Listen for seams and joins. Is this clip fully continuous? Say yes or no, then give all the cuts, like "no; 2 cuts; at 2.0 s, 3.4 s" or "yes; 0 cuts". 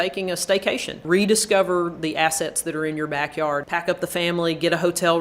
no; 2 cuts; at 1.0 s, 3.6 s